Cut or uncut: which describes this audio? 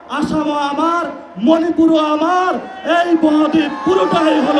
uncut